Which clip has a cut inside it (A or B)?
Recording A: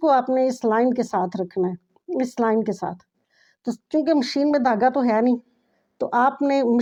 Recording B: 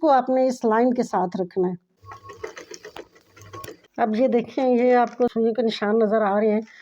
B